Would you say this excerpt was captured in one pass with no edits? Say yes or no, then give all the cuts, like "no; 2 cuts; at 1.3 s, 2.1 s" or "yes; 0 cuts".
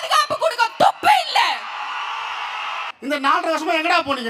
no; 1 cut; at 2.9 s